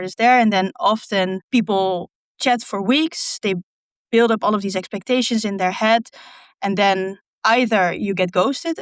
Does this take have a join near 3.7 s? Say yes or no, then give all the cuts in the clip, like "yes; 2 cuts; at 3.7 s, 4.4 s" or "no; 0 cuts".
no; 1 cut; at 1.4 s